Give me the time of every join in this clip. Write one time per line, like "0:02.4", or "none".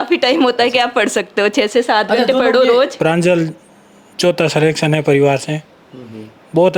0:03.0